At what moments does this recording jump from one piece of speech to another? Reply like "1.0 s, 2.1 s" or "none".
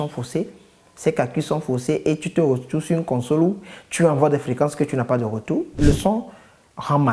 5.8 s